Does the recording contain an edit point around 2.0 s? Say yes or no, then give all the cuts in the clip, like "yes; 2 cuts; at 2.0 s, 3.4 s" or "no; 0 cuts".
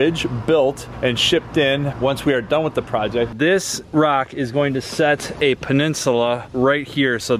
no; 1 cut; at 3.3 s